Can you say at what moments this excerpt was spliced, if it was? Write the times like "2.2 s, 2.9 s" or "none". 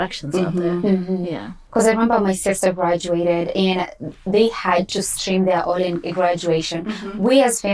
1.6 s